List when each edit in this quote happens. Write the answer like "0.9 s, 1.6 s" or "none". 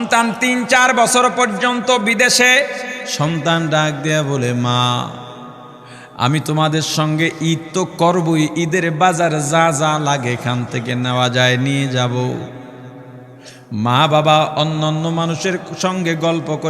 3.0 s